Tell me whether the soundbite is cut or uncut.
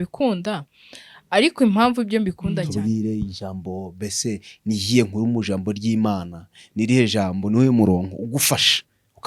cut